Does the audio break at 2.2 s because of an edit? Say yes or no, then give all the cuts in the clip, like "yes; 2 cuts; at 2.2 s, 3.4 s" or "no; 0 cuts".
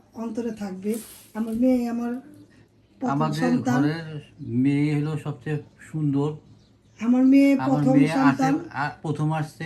no; 0 cuts